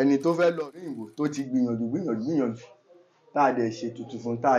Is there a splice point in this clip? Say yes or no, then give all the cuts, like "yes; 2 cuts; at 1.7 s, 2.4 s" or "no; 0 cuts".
yes; 1 cut; at 1.0 s